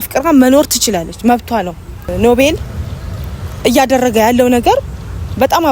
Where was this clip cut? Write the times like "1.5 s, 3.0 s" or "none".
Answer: 2.1 s